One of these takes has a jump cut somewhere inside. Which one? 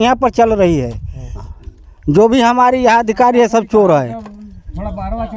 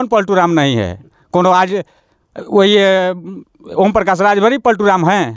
first; 1 cut; at 1.4 s

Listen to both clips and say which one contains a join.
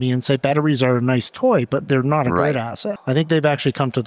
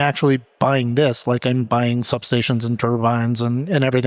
first; 1 cut; at 2.9 s

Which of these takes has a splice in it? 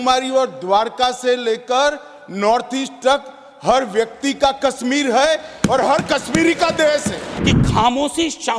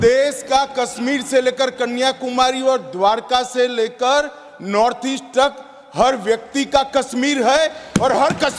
first; 1 cut; at 7.3 s

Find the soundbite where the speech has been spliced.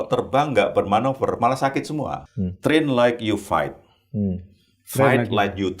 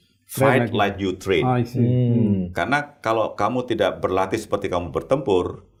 first; 1 cut; at 2.2 s

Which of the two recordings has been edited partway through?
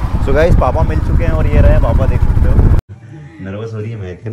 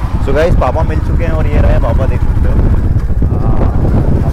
first; 1 cut; at 2.8 s

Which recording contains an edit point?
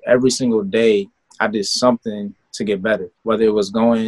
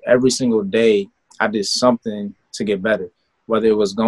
first; 1 cut; at 3.1 s

